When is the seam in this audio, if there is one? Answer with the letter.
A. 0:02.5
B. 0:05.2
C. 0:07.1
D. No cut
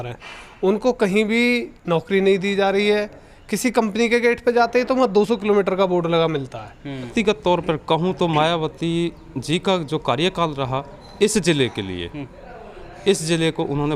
C